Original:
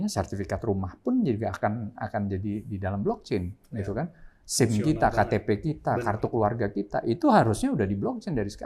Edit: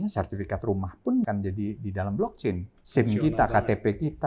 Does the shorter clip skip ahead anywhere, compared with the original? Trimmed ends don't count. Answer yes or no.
yes